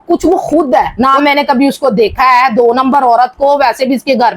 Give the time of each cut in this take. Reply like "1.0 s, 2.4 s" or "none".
0.9 s